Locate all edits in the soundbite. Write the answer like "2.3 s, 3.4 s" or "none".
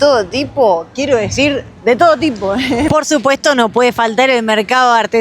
2.9 s